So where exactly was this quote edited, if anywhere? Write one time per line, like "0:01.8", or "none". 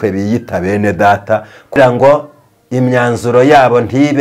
0:01.8